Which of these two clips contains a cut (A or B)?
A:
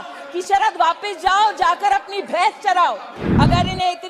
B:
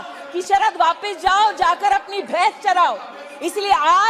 A